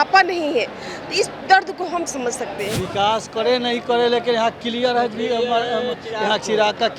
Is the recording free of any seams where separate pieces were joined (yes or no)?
no